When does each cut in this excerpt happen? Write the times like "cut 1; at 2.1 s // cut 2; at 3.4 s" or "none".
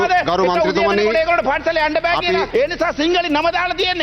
cut 1; at 2.5 s